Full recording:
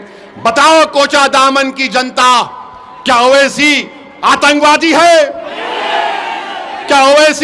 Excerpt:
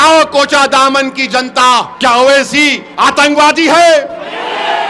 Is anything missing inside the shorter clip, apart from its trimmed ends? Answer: yes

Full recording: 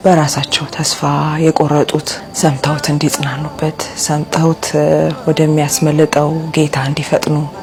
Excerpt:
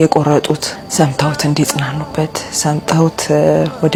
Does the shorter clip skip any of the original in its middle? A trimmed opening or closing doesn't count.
no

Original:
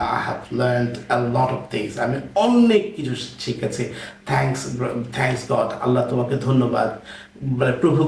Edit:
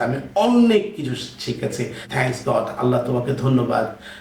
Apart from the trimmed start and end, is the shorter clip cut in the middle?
yes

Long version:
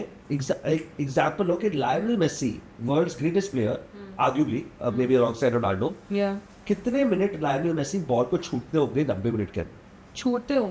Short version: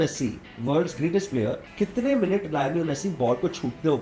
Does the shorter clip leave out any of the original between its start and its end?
yes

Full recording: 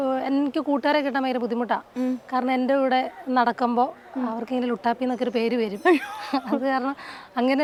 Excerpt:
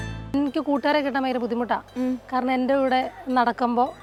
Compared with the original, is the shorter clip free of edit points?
yes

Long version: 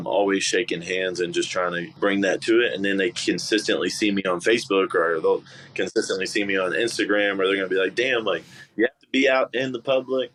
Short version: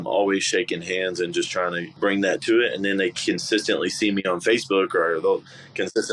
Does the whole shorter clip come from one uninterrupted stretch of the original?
yes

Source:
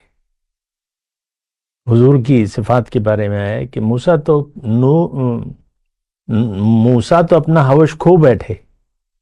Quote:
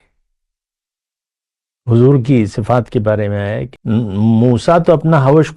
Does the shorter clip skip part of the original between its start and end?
yes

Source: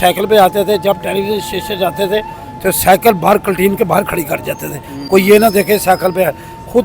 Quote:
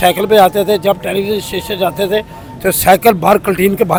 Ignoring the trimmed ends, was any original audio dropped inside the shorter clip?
no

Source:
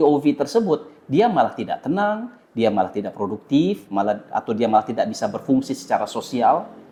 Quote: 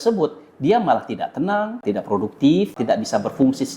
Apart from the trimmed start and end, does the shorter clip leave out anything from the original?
yes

